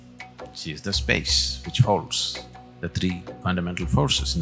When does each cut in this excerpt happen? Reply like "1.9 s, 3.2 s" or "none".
3.3 s